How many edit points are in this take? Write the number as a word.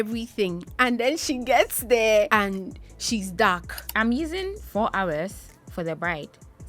two